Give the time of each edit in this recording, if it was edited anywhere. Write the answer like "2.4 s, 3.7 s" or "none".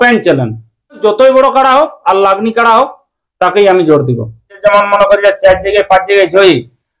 1.0 s, 4.6 s

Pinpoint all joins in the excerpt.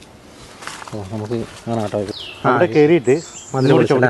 2.1 s

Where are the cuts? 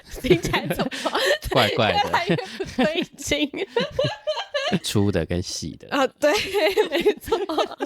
4.9 s

